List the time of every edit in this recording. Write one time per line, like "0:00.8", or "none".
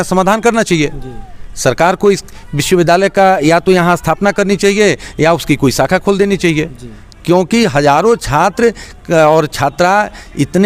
none